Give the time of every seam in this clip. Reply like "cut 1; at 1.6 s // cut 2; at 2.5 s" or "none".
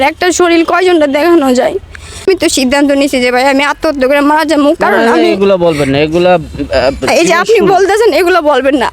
cut 1; at 2.3 s